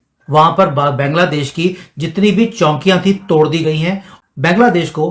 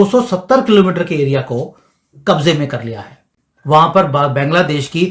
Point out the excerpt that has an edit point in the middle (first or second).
first